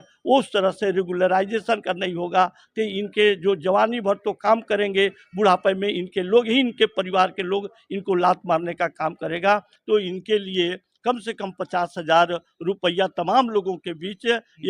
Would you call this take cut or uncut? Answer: cut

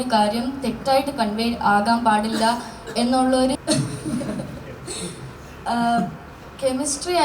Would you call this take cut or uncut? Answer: cut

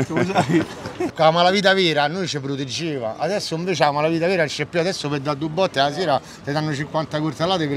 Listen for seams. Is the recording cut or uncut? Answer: cut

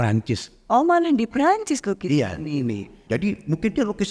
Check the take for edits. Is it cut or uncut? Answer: cut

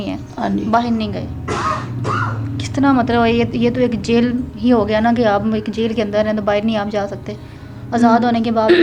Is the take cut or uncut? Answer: uncut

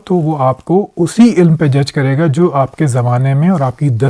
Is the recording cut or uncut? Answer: uncut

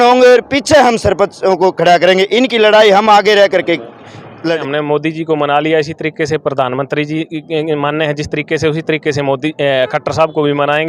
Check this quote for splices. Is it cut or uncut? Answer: cut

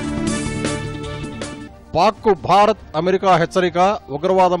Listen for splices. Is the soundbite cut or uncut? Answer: cut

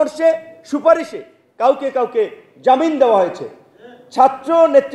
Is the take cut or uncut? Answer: uncut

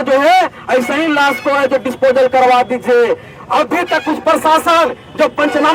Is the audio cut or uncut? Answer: uncut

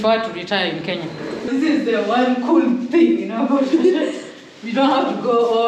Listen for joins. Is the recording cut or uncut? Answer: cut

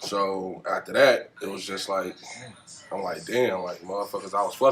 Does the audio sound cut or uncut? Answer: uncut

